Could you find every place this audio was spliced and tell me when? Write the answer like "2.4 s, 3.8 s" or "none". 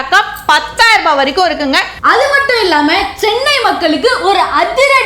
1.9 s